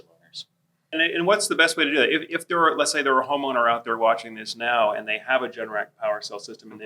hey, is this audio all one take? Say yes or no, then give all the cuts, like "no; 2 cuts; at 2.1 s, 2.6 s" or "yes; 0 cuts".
no; 1 cut; at 0.9 s